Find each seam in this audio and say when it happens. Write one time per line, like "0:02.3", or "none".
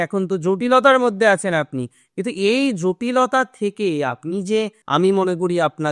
0:04.8